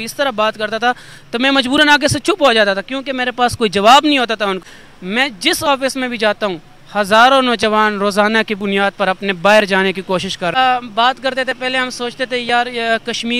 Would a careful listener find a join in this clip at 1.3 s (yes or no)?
no